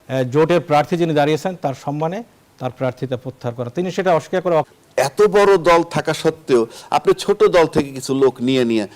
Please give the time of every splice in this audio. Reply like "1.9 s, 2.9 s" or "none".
4.7 s